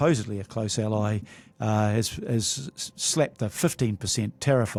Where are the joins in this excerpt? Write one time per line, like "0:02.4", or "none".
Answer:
none